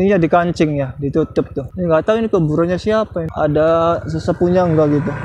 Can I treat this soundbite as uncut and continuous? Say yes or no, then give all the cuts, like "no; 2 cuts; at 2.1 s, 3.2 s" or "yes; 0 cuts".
no; 2 cuts; at 1.6 s, 3.3 s